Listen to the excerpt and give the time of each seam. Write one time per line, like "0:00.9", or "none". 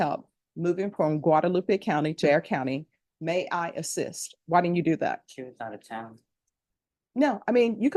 0:02.2